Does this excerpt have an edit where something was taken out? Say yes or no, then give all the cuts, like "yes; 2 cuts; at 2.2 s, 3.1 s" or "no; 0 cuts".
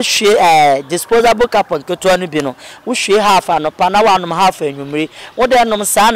no; 0 cuts